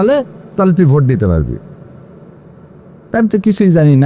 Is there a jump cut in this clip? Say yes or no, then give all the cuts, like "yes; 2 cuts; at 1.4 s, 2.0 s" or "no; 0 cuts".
no; 0 cuts